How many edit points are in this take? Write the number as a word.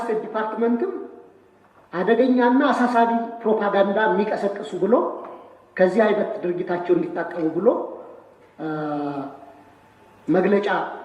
zero